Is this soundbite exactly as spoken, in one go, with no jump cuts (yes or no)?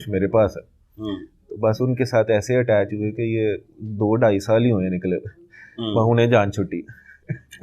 yes